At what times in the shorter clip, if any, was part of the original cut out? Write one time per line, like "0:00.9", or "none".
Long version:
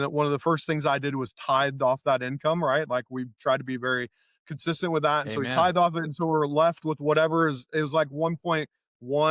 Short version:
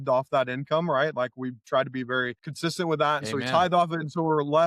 0:02.4